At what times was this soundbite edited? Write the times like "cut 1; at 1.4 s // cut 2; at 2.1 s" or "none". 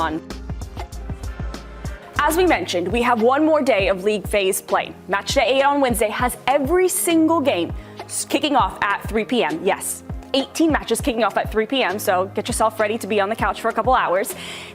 cut 1; at 13.3 s